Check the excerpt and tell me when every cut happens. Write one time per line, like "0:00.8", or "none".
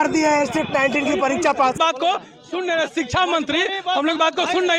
0:01.8